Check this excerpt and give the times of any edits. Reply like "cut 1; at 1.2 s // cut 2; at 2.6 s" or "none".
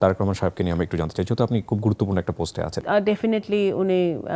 cut 1; at 2.8 s